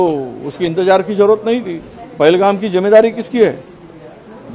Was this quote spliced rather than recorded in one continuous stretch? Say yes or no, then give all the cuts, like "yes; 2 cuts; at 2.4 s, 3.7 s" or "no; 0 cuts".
yes; 1 cut; at 2.0 s